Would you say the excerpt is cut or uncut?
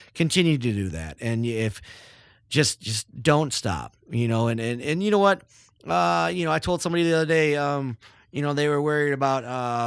uncut